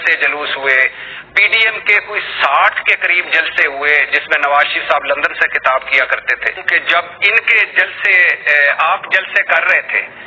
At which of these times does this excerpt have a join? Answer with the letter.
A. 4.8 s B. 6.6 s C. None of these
B